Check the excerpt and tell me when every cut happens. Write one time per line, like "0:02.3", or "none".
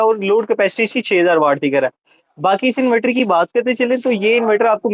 none